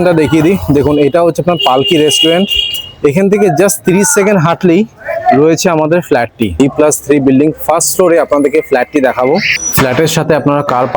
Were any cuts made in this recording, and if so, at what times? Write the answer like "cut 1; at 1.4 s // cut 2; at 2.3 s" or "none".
cut 1; at 6.5 s // cut 2; at 9.6 s